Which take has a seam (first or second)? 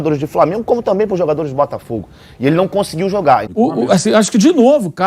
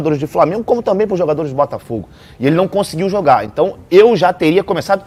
first